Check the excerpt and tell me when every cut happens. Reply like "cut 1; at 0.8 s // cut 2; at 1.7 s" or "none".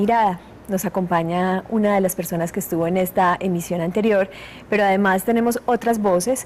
cut 1; at 3.1 s